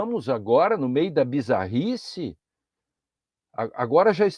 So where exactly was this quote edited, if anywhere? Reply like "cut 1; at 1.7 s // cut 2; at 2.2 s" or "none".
none